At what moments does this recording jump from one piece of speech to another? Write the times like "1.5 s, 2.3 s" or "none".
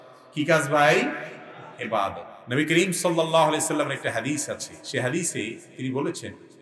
2.3 s